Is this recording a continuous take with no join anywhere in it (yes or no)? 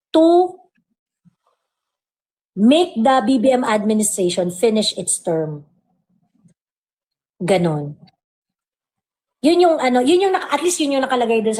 yes